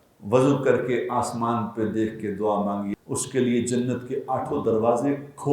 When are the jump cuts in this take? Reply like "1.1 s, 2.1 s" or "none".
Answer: 2.9 s